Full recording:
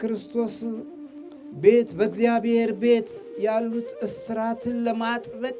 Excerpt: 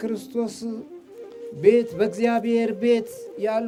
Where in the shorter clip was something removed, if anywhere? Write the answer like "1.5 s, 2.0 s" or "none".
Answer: none